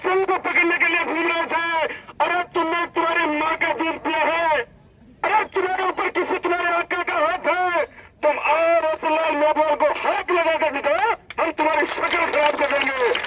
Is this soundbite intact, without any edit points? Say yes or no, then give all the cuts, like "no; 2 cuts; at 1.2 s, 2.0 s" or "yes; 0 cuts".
yes; 0 cuts